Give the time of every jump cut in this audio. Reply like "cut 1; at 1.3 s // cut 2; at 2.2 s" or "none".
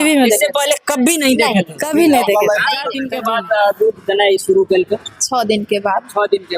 cut 1; at 3.0 s